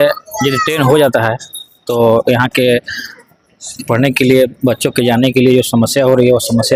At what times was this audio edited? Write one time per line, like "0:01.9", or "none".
none